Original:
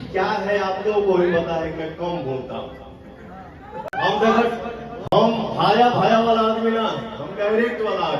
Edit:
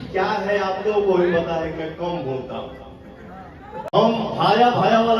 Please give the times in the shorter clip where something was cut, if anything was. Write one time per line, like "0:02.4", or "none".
0:03.9